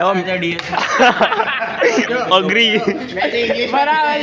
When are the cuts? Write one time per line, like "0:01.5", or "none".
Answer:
none